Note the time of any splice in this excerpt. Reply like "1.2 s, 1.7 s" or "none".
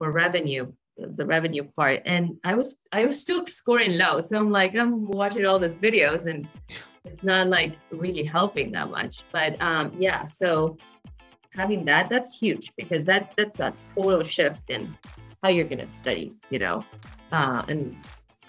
none

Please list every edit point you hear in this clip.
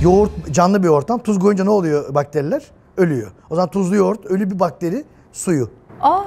none

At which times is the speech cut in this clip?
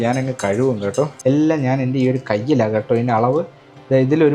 1.1 s

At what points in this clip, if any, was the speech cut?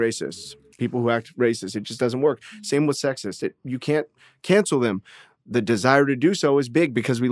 none

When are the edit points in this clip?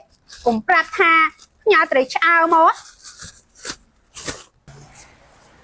none

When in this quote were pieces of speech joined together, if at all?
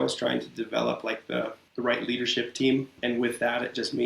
1.6 s, 2.9 s

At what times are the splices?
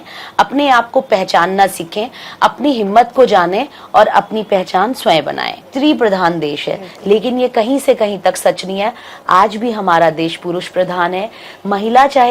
5.6 s

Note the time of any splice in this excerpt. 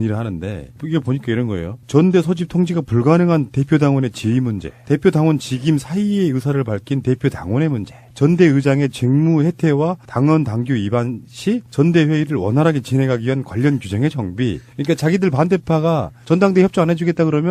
none

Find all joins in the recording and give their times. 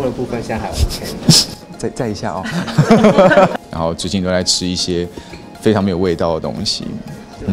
3.6 s

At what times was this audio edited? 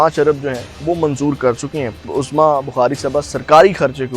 2.2 s

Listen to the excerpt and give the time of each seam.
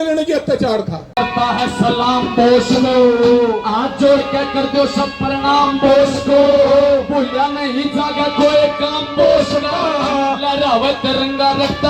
1.0 s

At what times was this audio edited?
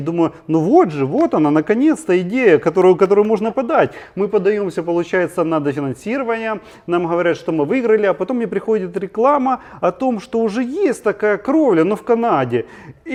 none

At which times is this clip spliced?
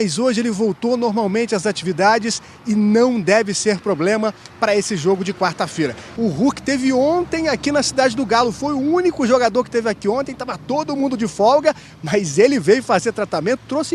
6.0 s

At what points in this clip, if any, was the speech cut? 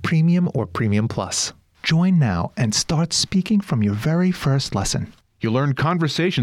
none

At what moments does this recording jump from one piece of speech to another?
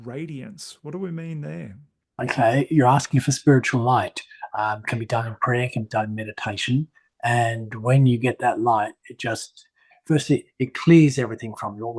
none

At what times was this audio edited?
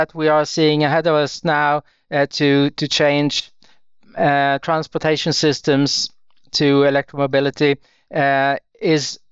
none

